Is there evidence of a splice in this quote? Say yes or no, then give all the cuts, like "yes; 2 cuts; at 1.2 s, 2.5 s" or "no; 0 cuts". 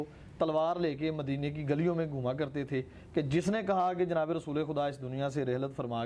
no; 0 cuts